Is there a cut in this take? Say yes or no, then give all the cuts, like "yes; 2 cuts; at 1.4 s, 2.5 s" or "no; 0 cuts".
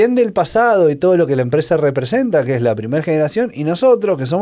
no; 0 cuts